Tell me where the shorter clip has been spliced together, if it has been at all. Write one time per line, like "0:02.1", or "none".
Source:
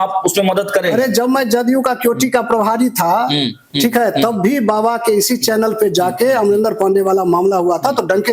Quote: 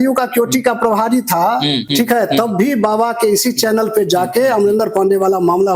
0:01.8